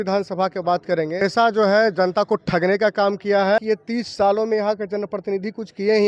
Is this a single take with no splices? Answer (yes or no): no